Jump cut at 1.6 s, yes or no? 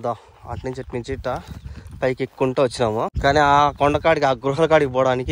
no